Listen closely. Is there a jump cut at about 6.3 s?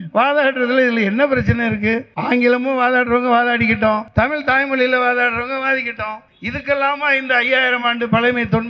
yes; 3 cuts; at 2.1 s, 4.1 s, 6.3 s

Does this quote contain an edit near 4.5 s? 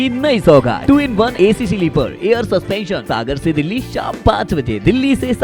no; 2 cuts; at 0.9 s, 3.0 s

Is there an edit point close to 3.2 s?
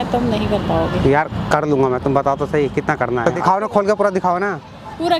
yes; 1 cut; at 3.2 s

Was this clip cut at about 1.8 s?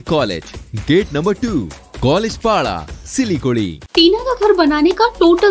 no; 1 cut; at 3.8 s

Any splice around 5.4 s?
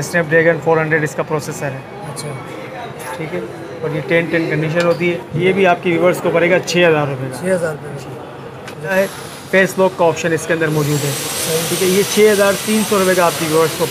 yes; 2 cuts; at 5.4 s, 8.9 s

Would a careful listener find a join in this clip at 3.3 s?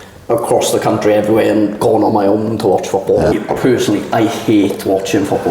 yes; 1 cut; at 3.3 s

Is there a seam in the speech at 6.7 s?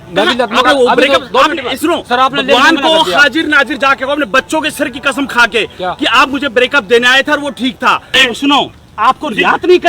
no; 1 cut; at 8.2 s

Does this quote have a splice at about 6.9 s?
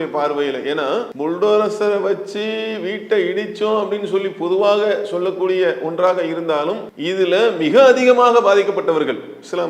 yes; 2 cuts; at 1.1 s, 6.9 s

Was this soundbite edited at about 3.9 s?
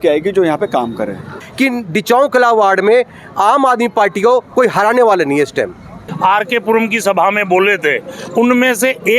no; 2 cuts; at 1.4 s, 6.0 s

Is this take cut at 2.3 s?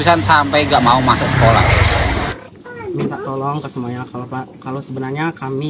yes; 1 cut; at 2.3 s

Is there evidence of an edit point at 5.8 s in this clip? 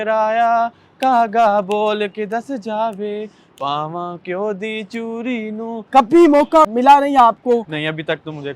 yes; 1 cut; at 5.8 s

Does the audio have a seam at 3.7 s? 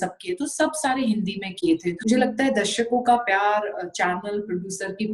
no; 1 cut; at 2.0 s

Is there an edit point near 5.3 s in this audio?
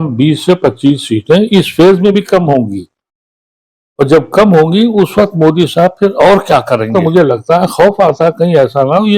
no; 1 cut; at 6.9 s

